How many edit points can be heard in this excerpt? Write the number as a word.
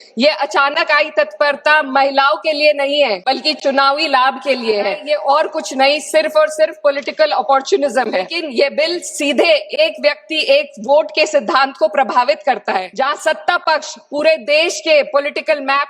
four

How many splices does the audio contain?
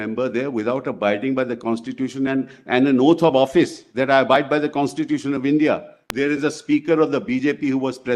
one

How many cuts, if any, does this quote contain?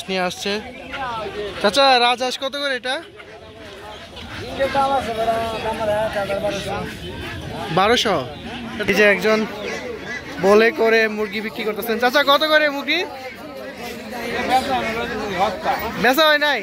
one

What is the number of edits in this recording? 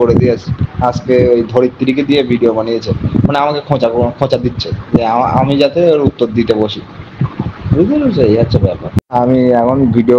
zero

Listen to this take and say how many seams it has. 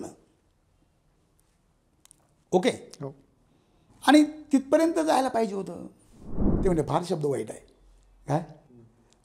one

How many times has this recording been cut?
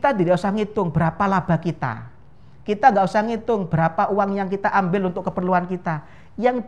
zero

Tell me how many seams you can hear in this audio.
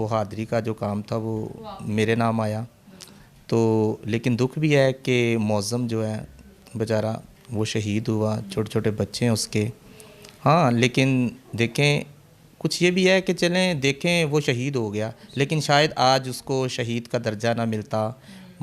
zero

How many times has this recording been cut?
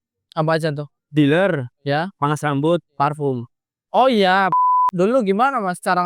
two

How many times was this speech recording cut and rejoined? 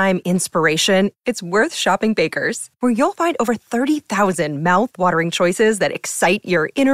zero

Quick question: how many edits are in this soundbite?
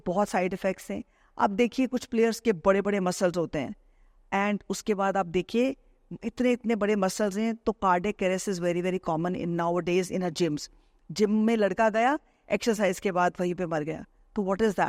zero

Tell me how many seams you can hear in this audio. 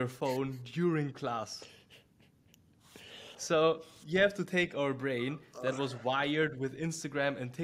zero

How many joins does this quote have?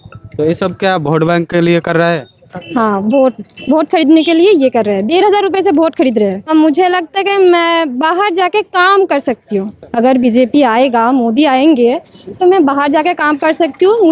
one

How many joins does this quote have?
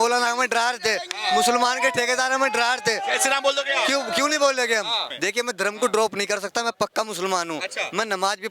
one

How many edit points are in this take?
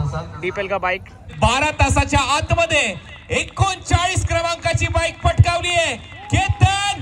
one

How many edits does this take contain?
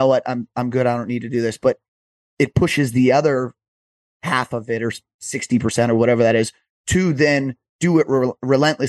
zero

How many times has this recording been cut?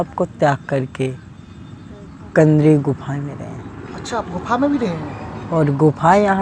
zero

